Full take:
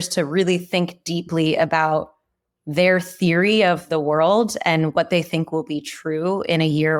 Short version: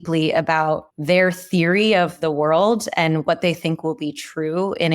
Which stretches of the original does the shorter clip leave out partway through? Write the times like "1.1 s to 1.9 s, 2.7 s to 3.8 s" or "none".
2.1 s to 2.6 s